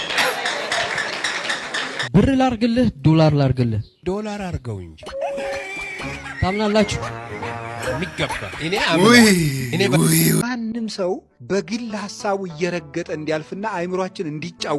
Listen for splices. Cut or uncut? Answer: cut